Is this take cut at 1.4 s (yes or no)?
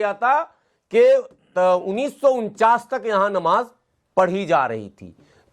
no